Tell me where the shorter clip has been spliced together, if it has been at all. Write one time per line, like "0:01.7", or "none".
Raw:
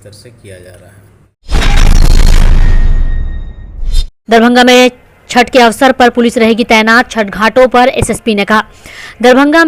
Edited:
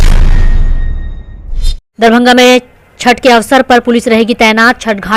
none